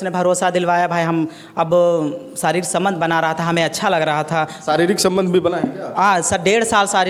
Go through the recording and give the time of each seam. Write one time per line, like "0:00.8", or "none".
none